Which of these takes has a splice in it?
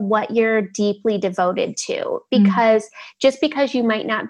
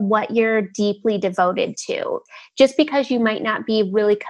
second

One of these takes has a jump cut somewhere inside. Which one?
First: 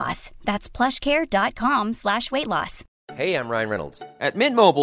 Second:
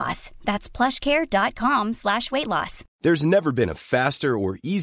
first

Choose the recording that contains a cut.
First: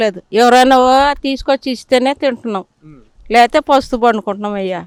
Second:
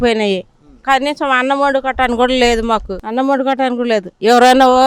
second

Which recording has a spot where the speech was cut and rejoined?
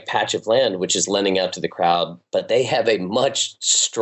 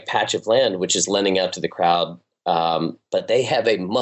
first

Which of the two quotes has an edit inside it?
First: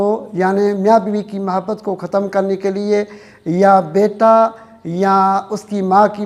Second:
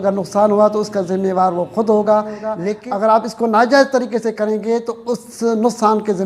second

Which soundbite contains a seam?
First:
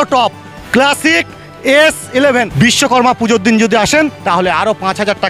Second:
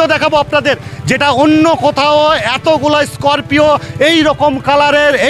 first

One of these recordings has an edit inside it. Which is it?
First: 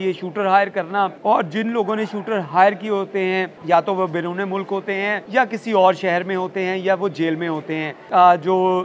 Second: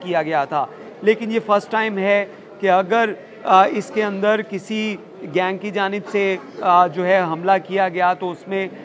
first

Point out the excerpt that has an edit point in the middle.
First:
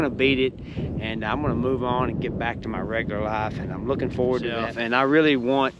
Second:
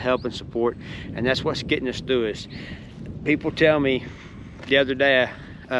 first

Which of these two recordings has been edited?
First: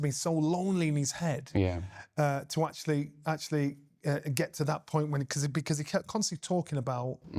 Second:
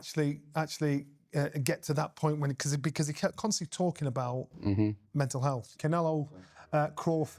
second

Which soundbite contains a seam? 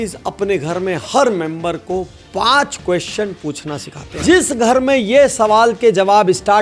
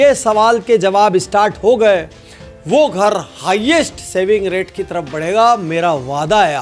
first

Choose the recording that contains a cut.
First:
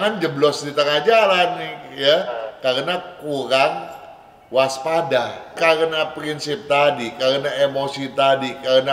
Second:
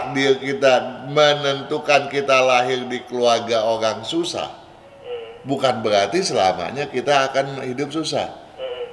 first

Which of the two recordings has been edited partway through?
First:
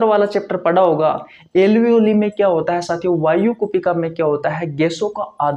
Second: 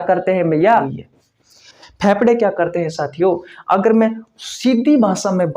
second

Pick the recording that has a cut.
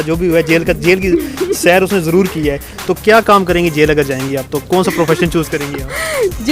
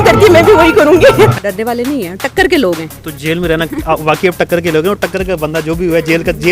second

